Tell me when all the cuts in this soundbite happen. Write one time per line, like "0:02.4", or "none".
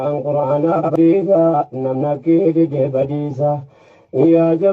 0:00.9